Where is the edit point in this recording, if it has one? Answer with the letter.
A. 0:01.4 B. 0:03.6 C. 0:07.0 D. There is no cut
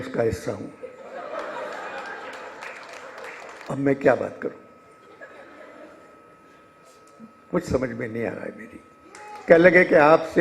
B